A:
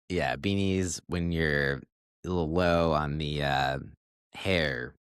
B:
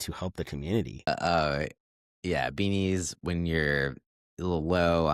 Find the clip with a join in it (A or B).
B